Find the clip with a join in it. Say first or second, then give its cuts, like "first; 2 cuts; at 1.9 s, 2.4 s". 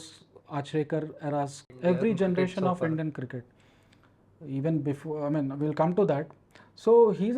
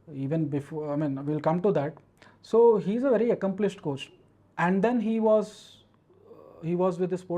first; 1 cut; at 1.6 s